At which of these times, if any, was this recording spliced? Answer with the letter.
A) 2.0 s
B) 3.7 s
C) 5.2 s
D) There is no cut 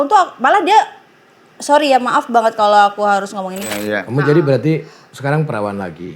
B